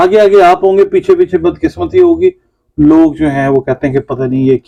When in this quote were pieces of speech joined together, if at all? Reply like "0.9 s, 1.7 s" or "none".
none